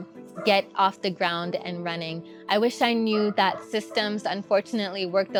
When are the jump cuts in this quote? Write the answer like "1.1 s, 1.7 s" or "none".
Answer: none